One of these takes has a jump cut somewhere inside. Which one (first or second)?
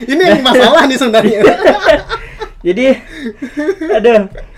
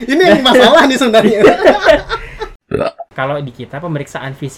second